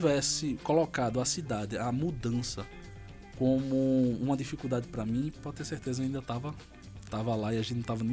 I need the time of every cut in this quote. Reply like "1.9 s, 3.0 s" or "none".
none